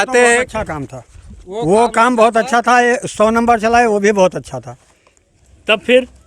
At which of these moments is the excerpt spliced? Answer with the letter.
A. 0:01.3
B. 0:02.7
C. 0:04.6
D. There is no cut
D